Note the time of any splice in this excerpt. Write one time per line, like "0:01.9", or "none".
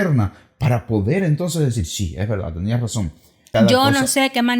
0:03.5